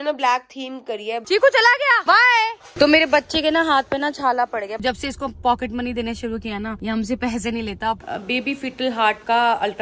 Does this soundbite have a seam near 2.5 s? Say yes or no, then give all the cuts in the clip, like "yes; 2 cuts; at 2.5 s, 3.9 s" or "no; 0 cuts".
no; 3 cuts; at 1.2 s, 4.8 s, 8.0 s